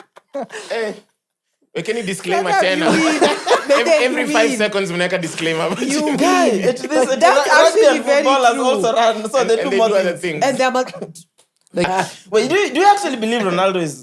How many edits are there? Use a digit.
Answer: 1